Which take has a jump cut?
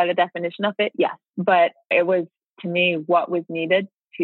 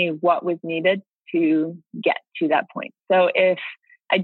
first; 2 cuts; at 1.3 s, 1.9 s

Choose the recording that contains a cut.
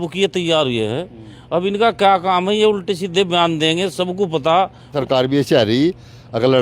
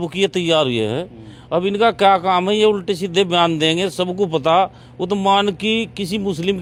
first; 1 cut; at 5.0 s

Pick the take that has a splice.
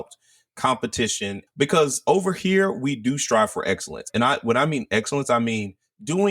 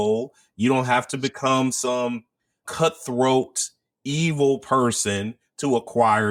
first; 2 cuts; at 1.4 s, 4.1 s

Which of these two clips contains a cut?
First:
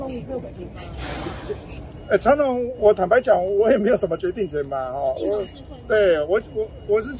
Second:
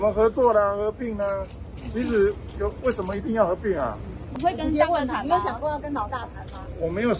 second; 1 cut; at 4.2 s

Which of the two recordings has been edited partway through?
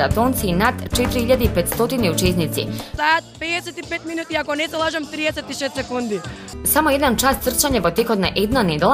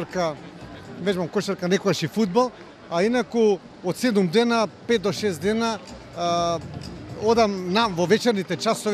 first; 2 cuts; at 2.9 s, 6.5 s

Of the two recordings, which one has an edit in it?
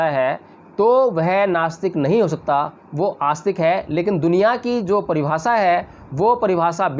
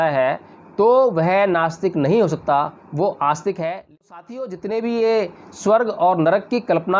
second; 1 cut; at 3.9 s

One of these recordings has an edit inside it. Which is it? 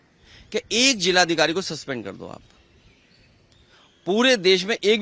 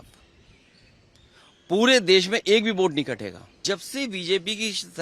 second; 1 cut; at 3.6 s

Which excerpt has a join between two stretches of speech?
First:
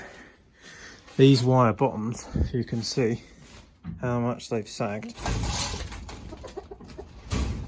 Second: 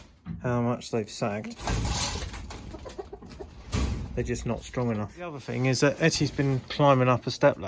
second; 1 cut; at 5.5 s

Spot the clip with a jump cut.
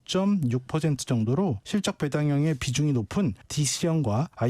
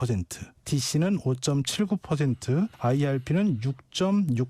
first; 1 cut; at 1.7 s

